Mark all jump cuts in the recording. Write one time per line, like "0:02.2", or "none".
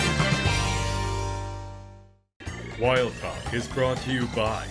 0:01.7